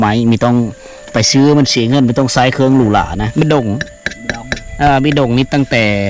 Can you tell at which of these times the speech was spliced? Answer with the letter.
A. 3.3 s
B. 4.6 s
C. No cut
A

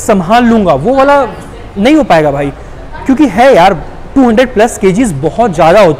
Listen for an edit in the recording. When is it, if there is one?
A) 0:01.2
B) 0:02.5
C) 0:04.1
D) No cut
D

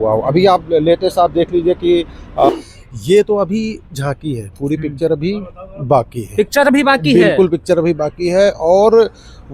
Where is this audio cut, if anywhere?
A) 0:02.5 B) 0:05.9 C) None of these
A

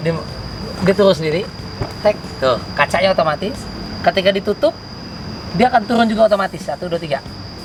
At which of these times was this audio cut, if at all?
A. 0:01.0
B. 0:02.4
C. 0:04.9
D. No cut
D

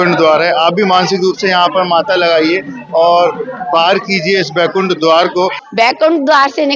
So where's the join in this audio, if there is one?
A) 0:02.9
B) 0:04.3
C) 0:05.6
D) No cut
C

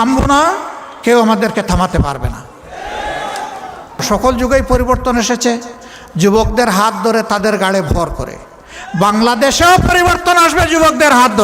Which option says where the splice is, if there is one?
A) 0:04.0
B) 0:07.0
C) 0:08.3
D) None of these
A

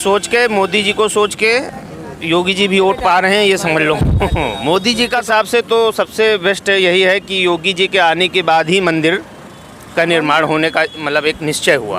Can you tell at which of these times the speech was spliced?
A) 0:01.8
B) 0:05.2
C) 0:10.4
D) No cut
B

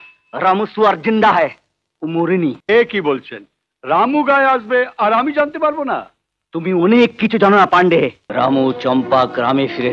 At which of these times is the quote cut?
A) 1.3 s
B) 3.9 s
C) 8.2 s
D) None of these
C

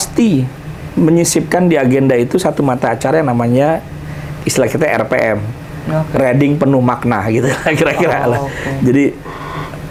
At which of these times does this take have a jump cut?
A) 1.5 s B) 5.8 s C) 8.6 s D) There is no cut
D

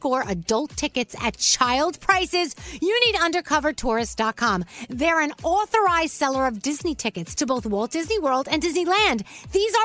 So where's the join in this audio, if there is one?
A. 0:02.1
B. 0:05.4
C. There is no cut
C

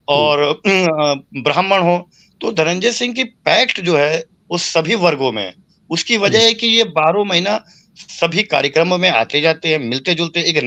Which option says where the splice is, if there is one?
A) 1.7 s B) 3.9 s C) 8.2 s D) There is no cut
D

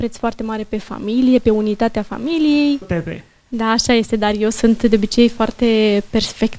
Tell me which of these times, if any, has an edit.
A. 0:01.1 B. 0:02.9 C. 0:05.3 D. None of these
B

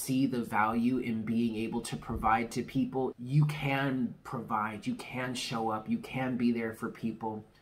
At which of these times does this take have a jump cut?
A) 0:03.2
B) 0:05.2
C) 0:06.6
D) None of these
A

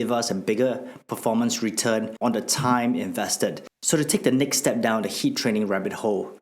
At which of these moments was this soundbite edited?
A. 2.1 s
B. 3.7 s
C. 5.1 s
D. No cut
A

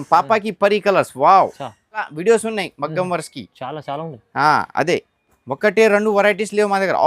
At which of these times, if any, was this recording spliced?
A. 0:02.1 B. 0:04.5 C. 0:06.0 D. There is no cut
A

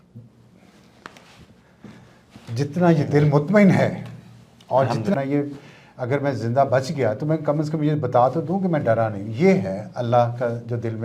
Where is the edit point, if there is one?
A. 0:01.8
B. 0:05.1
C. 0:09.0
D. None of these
B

